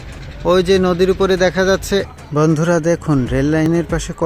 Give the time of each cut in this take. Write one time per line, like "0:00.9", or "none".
0:02.1